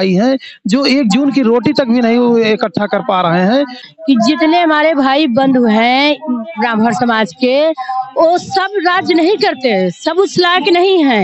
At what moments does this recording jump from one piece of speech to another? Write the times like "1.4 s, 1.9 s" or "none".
3.8 s